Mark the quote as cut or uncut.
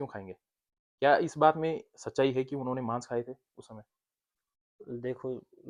uncut